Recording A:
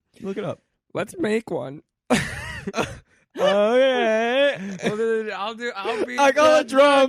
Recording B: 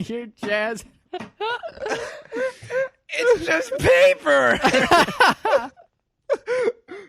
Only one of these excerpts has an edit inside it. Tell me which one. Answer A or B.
B